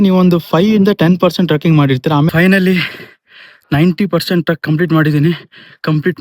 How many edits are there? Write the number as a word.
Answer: one